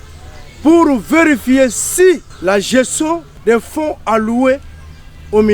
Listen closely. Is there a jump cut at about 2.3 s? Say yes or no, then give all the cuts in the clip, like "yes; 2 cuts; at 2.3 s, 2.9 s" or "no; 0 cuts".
yes; 2 cuts; at 2.3 s, 3.3 s